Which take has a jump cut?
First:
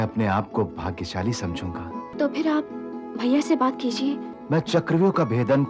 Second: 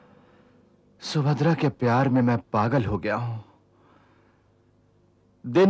first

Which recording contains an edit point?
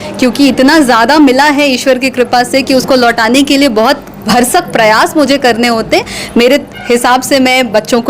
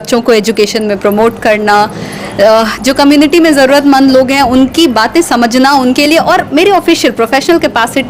first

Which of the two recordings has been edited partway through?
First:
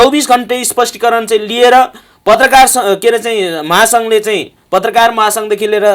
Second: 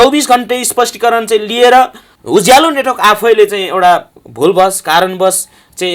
second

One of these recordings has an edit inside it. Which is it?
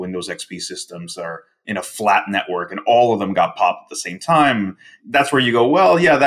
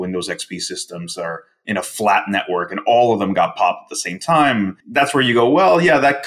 second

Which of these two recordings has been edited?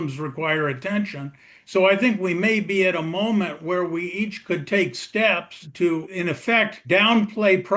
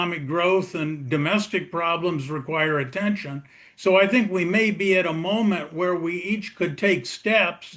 first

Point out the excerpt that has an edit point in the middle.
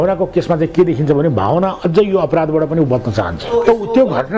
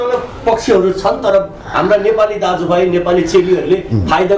first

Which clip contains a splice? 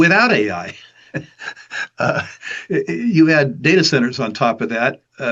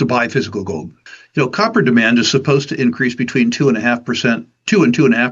second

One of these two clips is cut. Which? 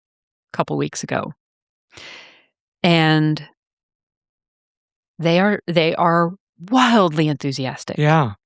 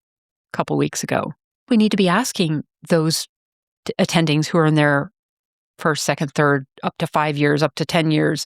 second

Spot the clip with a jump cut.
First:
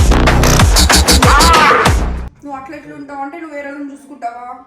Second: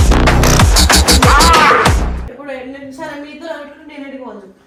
first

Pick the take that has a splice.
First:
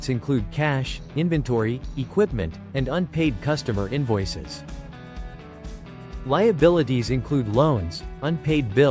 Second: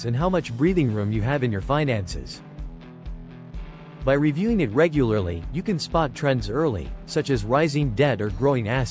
second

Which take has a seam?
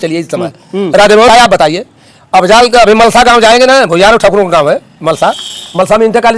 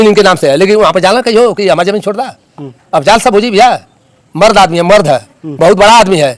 first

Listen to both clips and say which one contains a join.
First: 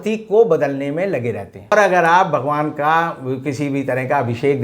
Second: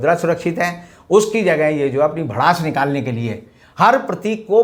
first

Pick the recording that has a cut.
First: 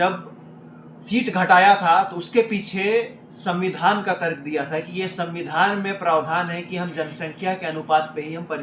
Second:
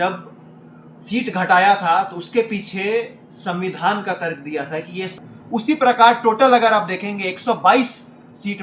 second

